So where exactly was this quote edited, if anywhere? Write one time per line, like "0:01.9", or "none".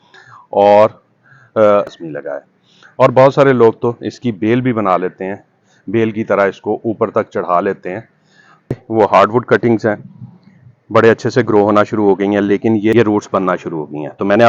0:02.0
0:08.7
0:12.9